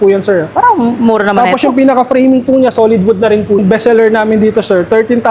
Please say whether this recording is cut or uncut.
cut